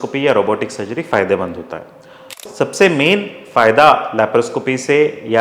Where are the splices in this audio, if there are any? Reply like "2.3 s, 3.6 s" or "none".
2.2 s